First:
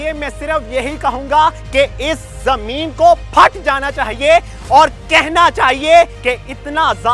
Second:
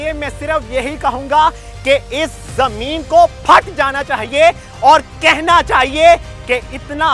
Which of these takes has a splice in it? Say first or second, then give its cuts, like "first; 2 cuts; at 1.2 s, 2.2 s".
first; 2 cuts; at 1.6 s, 6.2 s